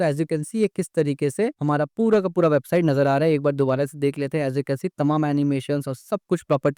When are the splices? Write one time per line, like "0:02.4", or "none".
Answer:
none